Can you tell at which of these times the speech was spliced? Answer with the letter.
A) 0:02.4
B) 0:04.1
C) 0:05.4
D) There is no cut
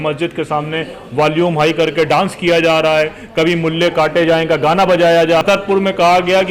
C